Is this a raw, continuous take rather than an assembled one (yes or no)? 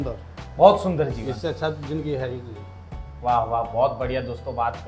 yes